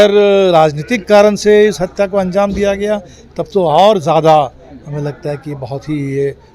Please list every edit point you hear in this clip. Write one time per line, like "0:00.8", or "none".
none